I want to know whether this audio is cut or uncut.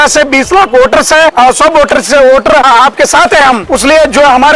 cut